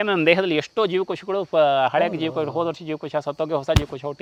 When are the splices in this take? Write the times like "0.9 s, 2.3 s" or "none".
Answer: none